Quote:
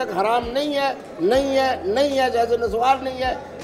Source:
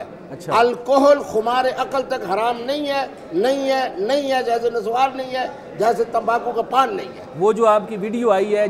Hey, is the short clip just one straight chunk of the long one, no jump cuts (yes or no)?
yes